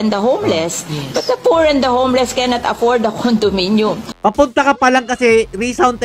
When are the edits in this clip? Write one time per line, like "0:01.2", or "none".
0:04.1

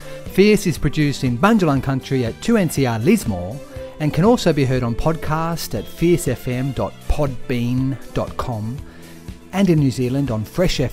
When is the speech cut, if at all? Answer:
none

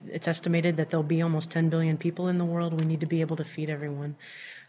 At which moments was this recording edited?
none

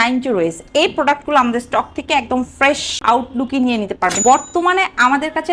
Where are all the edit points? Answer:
0:04.2

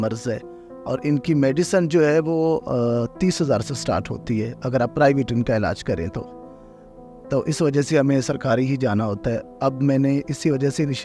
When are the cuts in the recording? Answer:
none

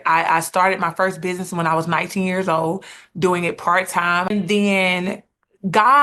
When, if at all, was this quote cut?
0:04.3

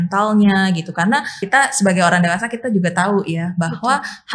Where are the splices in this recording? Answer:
0:01.4

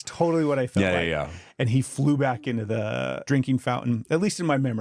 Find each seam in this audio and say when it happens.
0:03.2

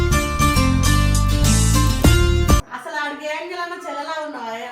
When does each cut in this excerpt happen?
0:02.7

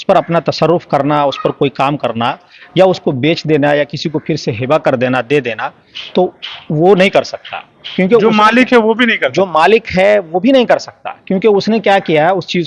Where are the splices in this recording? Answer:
none

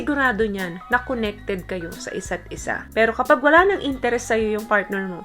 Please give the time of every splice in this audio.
0:02.8

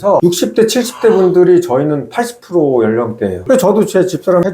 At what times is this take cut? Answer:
0:03.4

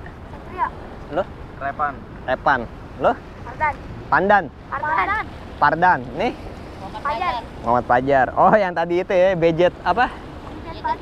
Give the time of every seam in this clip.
none

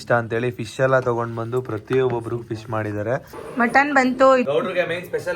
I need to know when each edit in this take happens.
0:03.4
0:04.4

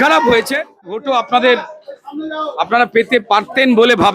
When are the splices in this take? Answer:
0:00.9

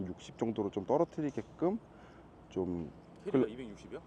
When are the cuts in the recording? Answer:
none

